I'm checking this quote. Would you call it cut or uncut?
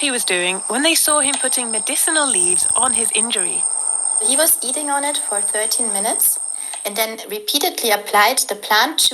cut